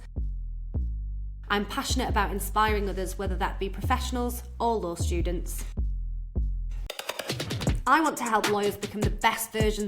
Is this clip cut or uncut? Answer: cut